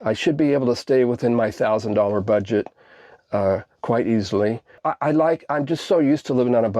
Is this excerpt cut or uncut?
cut